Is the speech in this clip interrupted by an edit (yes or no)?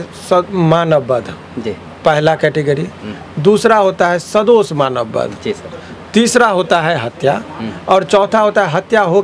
no